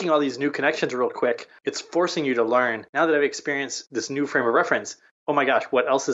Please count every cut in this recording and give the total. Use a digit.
2